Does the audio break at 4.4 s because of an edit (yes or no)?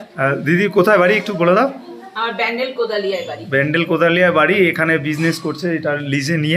no